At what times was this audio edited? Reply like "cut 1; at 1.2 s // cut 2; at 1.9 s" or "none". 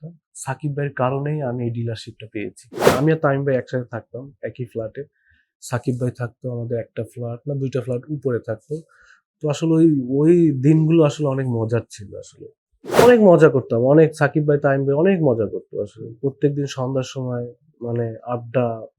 cut 1; at 2.9 s // cut 2; at 13.0 s